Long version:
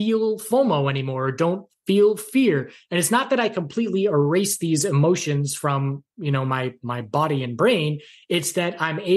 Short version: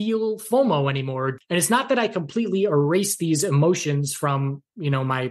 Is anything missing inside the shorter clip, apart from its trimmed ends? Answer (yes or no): yes